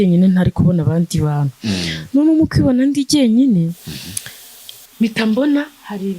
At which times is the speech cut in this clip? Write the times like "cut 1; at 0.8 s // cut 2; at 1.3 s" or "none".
none